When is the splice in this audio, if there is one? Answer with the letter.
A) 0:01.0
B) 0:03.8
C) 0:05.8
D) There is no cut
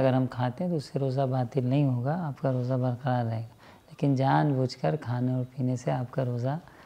D